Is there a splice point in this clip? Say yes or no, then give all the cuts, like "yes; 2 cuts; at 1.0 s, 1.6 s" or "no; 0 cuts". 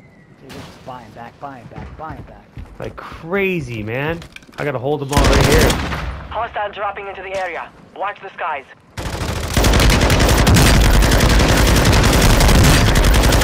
no; 0 cuts